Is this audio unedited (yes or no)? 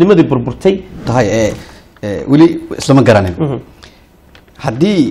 no